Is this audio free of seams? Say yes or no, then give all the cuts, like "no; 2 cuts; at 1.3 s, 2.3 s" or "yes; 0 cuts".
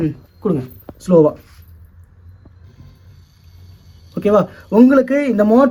yes; 0 cuts